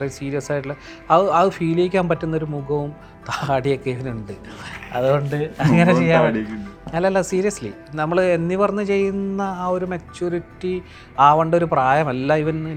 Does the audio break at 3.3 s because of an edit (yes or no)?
no